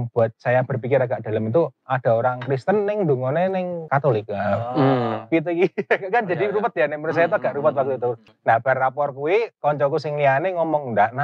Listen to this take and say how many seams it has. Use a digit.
2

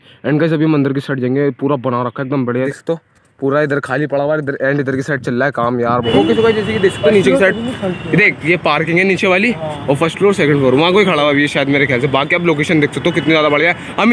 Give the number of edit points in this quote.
2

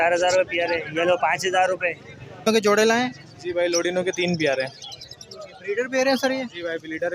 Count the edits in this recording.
1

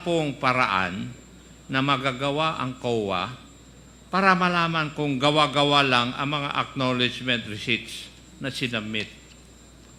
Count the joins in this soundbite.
0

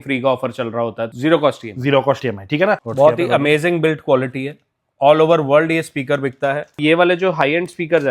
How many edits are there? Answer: 3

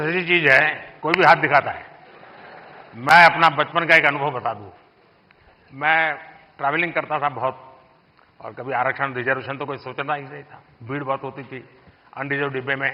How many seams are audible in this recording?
0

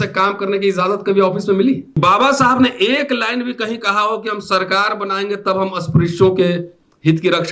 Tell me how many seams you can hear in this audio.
1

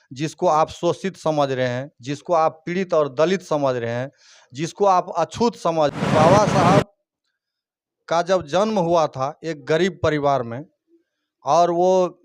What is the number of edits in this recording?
1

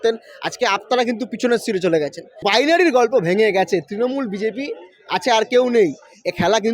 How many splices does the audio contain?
1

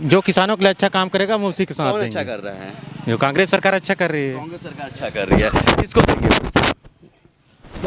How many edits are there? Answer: 0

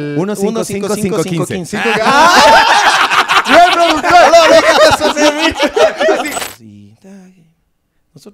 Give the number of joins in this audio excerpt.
1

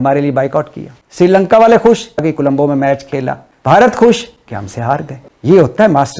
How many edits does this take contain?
1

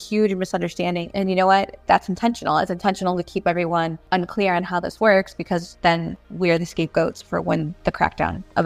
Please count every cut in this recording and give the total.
5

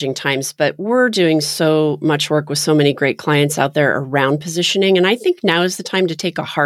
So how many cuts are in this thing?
0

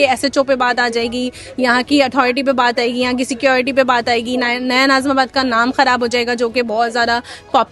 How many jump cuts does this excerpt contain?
0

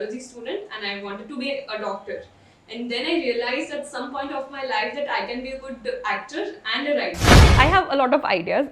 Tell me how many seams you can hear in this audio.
1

